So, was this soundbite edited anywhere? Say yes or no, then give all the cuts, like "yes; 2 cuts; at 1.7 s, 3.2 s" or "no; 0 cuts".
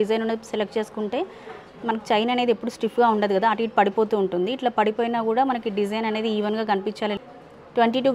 yes; 1 cut; at 7.2 s